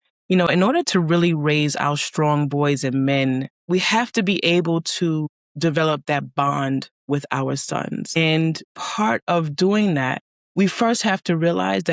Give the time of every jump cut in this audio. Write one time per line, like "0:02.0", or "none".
0:03.5